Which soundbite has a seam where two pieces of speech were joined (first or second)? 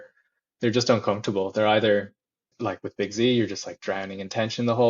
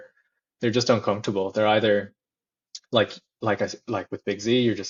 first